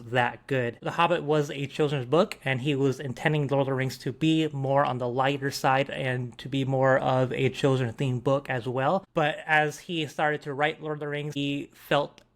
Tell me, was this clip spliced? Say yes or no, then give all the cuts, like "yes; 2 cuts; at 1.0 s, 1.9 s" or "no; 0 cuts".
yes; 3 cuts; at 0.8 s, 9.1 s, 11.4 s